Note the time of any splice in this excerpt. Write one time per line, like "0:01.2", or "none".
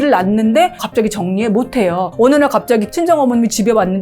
0:00.8
0:02.1
0:02.9